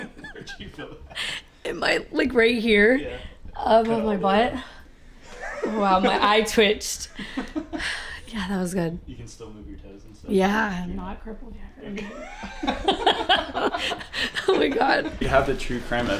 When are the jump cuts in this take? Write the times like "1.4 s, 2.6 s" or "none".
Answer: 15.3 s

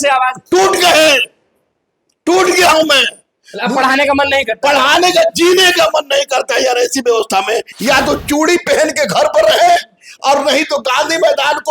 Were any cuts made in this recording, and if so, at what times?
7.7 s

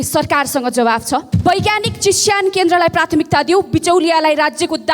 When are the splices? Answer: 1.3 s

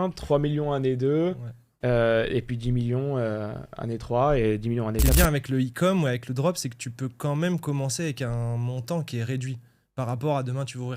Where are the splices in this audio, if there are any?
5.0 s

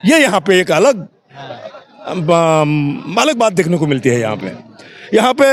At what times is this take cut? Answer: none

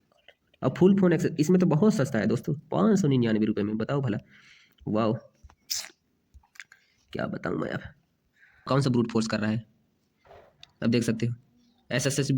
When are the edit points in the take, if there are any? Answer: 8.7 s

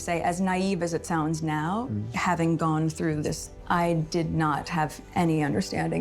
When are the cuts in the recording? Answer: 3.6 s

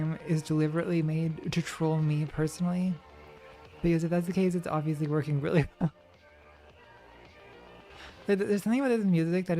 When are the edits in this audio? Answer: 8.1 s

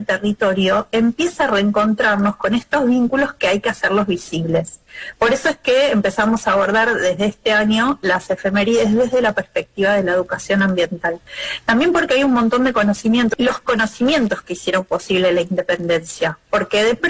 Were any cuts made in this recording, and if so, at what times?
13.3 s

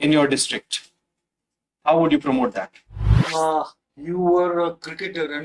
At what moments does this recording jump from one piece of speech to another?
3.2 s

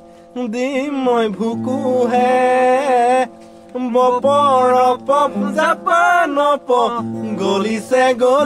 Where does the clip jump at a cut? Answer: none

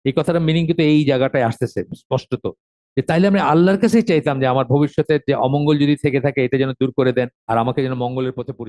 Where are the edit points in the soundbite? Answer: 7.4 s

